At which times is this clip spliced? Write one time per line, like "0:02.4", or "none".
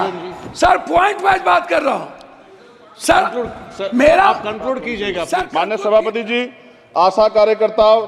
0:05.5